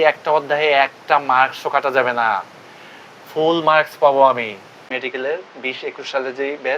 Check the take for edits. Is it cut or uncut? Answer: cut